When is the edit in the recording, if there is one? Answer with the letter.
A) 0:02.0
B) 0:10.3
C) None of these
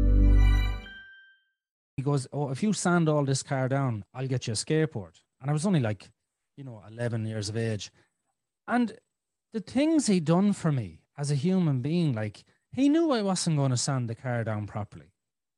A